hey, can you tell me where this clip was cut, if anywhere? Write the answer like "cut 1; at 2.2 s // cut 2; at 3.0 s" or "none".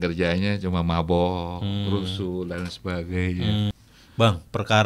cut 1; at 3.7 s